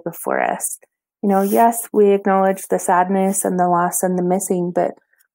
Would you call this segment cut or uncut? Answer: cut